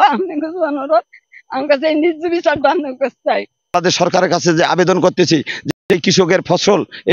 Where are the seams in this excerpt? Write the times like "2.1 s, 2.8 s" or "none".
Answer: 3.9 s